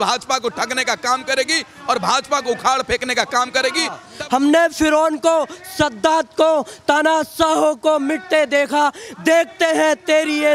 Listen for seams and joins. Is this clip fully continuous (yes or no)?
no